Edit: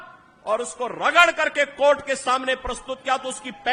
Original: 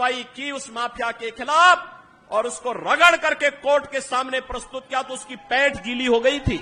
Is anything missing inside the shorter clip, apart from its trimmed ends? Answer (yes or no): no